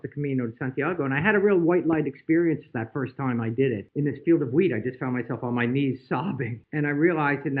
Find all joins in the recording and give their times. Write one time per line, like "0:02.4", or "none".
0:03.9
0:06.6